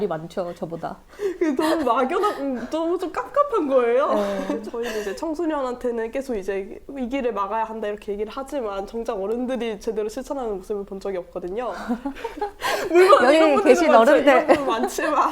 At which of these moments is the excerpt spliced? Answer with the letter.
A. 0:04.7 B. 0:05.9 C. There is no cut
A